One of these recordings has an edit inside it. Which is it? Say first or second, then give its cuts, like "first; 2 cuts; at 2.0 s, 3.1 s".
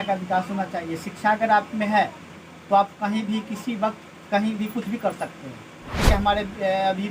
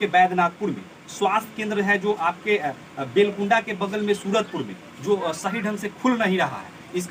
first; 1 cut; at 6.0 s